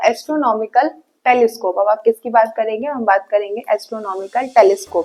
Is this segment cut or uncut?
uncut